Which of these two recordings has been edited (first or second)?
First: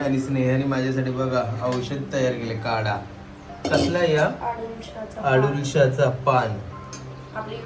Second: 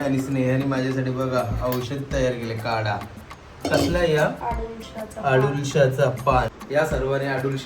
second